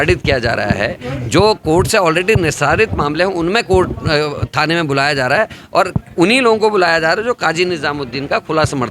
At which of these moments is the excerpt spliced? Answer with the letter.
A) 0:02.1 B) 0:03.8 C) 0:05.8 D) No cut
D